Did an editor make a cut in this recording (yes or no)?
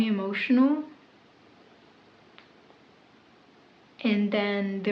no